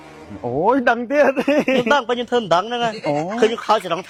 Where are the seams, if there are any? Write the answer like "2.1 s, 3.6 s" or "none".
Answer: none